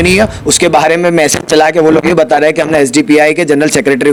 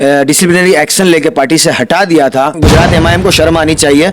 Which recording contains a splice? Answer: second; 1 cut; at 2.6 s

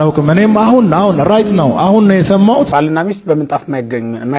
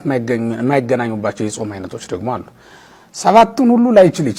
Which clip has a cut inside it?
first; 1 cut; at 2.7 s

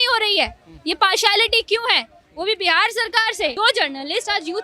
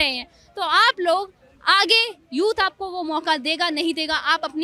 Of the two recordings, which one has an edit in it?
first; 1 cut; at 3.5 s

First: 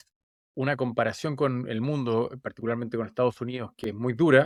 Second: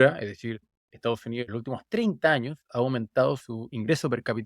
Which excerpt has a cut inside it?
second; 2 cuts; at 1.5 s, 3.4 s

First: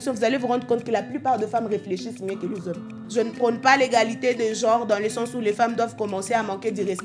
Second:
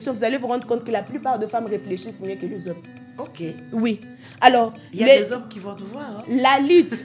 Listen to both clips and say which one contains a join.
first; 1 cut; at 2.9 s

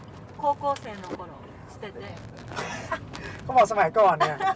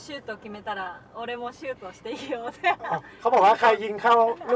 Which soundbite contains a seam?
first; 1 cut; at 2.1 s

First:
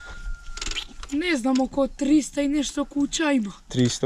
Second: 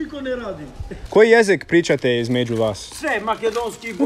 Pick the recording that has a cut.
second; 1 cut; at 1.0 s

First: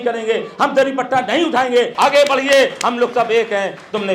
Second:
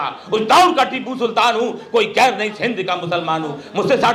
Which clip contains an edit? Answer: first; 1 cut; at 1.9 s

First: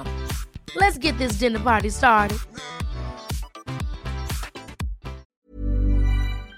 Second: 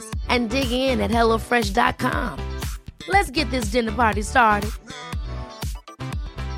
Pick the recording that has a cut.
first; 1 cut; at 5.2 s

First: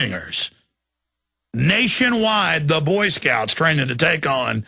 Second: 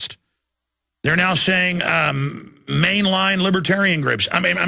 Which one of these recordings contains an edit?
first; 1 cut; at 3.4 s

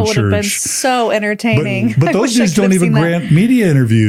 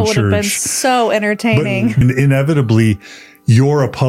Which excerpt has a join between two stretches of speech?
second; 1 cut; at 2.0 s

